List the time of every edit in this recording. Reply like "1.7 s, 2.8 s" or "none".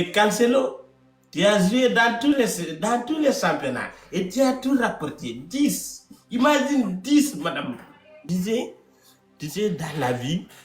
8.2 s

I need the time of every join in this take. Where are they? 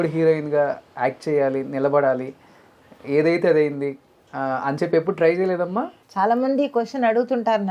none

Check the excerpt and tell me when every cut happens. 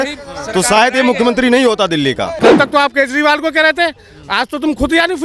2.3 s

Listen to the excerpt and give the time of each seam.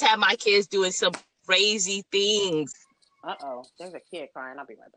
2.7 s

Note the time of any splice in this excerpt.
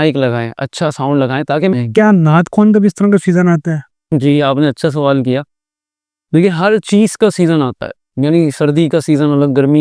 1.7 s

